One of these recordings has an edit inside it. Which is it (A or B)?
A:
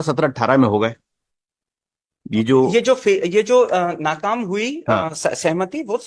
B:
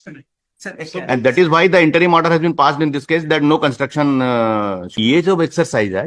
B